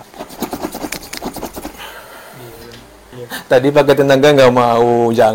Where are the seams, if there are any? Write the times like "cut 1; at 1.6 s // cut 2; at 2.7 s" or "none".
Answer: cut 1; at 3.1 s